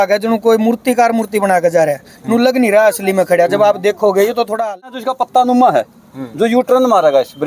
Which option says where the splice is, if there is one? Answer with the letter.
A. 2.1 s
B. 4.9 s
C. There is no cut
B